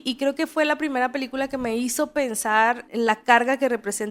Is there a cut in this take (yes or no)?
yes